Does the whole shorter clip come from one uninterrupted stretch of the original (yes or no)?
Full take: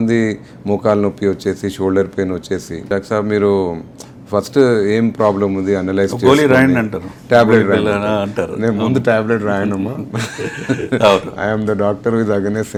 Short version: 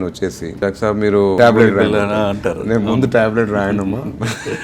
no